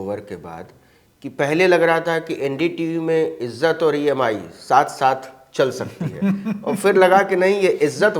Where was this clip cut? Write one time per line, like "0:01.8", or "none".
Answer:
none

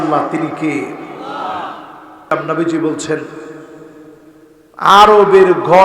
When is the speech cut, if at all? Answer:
0:02.3

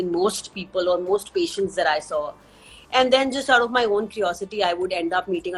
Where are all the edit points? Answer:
none

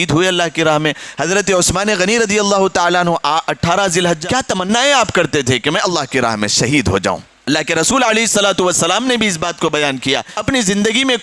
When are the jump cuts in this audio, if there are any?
0:04.6
0:07.3
0:10.3

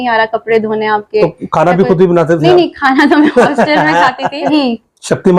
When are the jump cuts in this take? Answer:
0:04.5

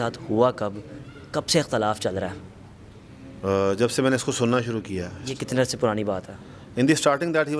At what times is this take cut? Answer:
none

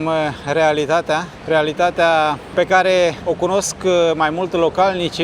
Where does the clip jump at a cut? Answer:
none

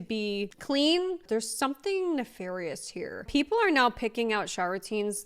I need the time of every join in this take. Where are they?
0:03.3

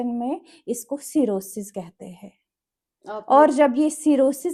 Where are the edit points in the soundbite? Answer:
none

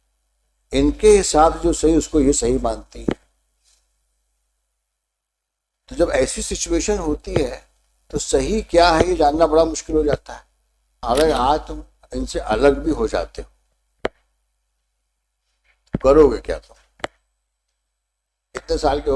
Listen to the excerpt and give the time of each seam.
0:10.9

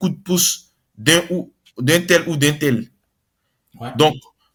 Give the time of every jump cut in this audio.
none

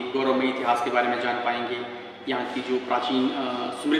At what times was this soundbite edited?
none

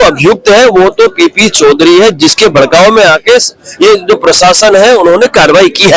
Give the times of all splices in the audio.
none

